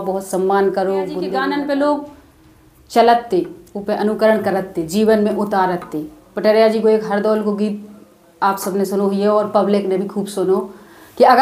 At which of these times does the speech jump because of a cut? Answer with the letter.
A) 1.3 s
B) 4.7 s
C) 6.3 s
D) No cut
A